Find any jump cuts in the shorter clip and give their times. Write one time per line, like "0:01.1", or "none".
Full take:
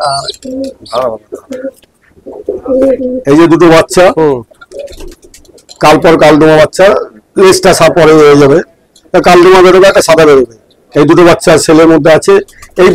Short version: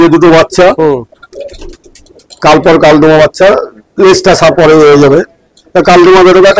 none